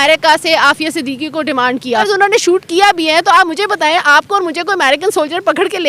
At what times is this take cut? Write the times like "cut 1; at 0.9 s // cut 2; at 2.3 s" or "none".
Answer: cut 1; at 2.0 s